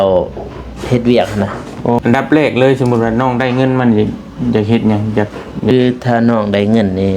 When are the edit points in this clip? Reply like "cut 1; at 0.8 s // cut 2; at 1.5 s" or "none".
cut 1; at 2.0 s // cut 2; at 5.7 s